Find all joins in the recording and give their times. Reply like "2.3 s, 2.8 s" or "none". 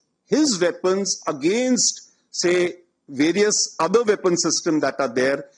none